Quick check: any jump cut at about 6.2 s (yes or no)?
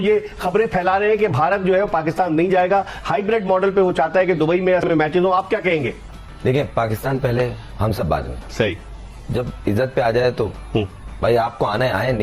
yes